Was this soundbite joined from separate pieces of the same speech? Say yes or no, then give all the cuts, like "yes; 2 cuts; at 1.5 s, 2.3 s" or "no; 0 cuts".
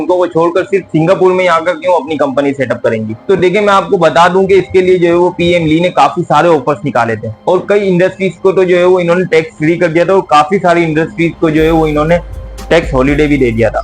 no; 0 cuts